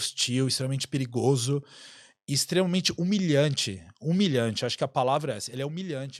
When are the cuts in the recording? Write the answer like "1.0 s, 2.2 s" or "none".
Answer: none